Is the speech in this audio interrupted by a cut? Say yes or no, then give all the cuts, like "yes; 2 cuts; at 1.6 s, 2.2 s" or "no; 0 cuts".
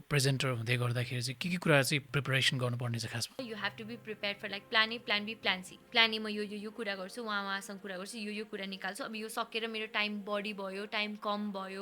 yes; 2 cuts; at 3.4 s, 5.7 s